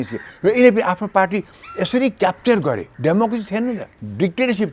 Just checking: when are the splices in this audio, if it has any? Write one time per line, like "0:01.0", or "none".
0:02.9